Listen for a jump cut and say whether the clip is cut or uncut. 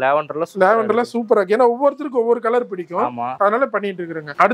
uncut